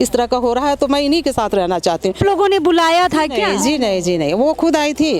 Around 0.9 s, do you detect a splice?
no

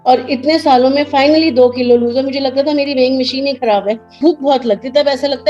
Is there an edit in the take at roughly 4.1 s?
yes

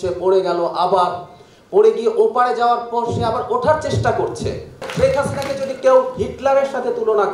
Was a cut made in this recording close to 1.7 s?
no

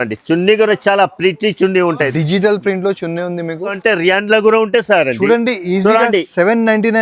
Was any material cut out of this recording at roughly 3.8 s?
yes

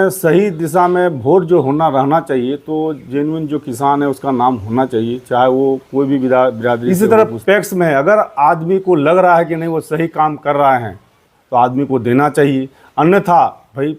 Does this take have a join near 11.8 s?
no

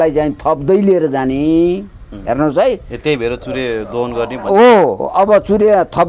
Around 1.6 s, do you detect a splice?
no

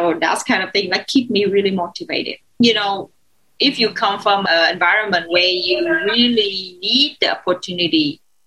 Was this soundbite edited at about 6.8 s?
no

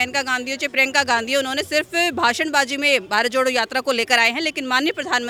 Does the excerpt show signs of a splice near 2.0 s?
no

